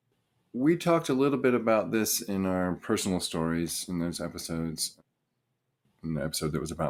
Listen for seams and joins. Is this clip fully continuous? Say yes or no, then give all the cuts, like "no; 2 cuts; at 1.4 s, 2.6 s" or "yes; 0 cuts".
yes; 0 cuts